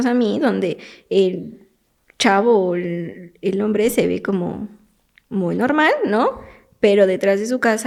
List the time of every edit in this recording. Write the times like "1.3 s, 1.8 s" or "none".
none